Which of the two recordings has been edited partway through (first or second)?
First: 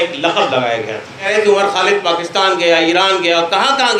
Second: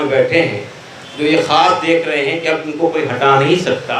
first